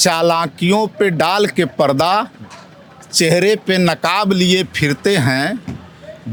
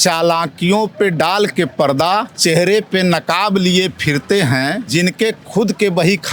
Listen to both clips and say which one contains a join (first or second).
second